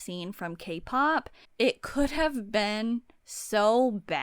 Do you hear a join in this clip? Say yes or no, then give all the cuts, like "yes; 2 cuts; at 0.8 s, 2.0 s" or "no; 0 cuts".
yes; 1 cut; at 1.4 s